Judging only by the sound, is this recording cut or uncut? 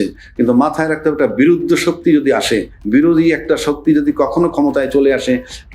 uncut